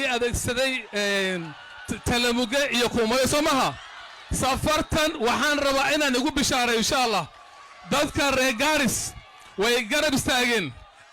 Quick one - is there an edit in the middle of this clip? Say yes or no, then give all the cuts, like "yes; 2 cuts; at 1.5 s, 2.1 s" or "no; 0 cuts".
no; 0 cuts